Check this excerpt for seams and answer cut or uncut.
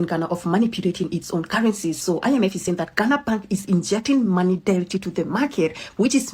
uncut